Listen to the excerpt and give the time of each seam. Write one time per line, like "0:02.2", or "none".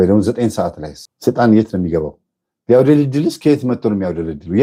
none